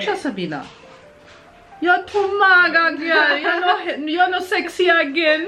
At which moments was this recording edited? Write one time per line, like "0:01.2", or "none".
none